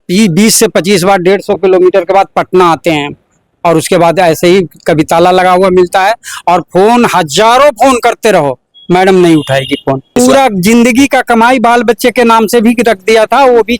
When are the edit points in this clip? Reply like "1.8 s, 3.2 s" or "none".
10.2 s

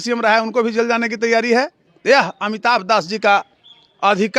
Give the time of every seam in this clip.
1.8 s

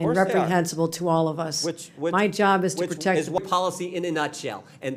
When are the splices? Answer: 3.4 s

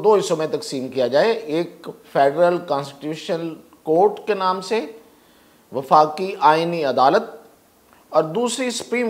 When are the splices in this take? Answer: none

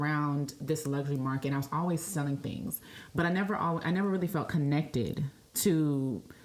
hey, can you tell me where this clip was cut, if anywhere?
none

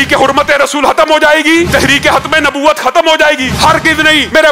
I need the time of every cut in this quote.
1.7 s, 3.8 s

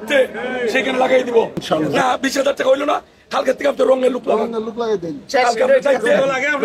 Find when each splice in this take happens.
1.6 s

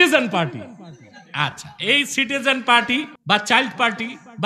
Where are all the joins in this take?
3.1 s

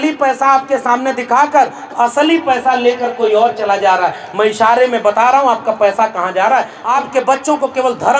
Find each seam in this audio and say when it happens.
6.8 s

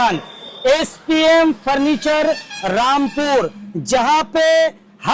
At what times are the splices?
none

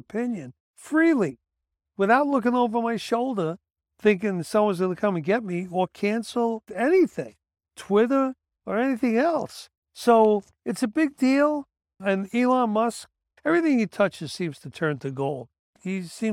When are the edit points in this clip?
6.7 s, 10.6 s, 13.2 s

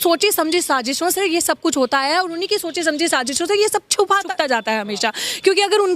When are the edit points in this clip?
none

